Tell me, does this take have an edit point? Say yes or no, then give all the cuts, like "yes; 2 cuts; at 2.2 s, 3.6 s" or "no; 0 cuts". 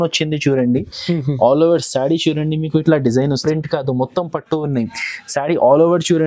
yes; 1 cut; at 3.4 s